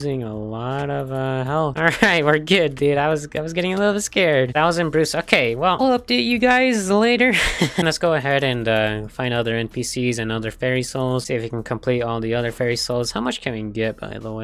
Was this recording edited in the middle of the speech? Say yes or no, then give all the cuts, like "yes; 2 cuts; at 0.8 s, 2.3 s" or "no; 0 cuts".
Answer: no; 0 cuts